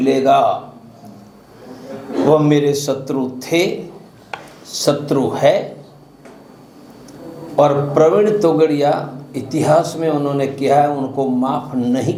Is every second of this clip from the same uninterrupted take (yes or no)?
yes